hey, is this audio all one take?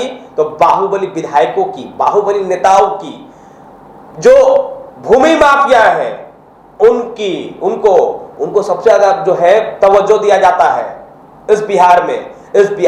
yes; 0 cuts

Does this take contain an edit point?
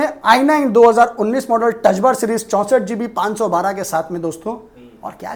no; 0 cuts

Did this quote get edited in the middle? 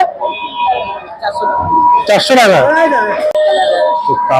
yes; 1 cut; at 3.3 s

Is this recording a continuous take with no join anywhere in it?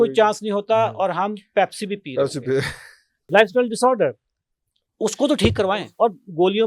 no; 2 cuts; at 3.2 s, 5.7 s

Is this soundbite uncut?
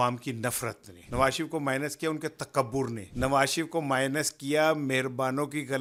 yes; 0 cuts

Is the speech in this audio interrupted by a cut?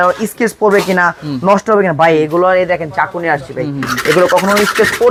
no; 0 cuts

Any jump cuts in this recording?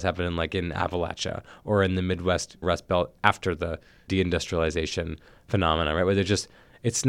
yes; 2 cuts; at 2.6 s, 3.9 s

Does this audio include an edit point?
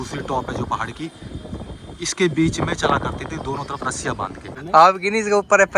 yes; 1 cut; at 4.6 s

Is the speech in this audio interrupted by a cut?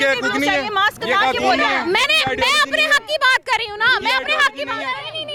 no; 0 cuts

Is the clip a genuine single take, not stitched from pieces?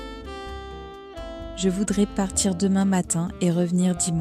no; 1 cut; at 1.6 s

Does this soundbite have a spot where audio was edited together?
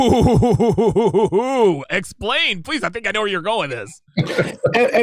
no; 0 cuts

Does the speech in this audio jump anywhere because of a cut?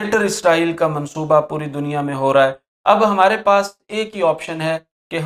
no; 0 cuts

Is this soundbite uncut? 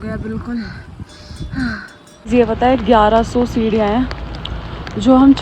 no; 1 cut; at 2.2 s

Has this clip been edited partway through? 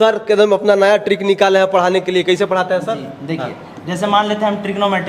no; 0 cuts

